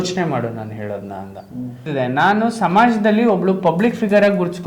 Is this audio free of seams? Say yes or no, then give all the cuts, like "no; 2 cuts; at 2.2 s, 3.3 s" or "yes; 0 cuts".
no; 1 cut; at 1.8 s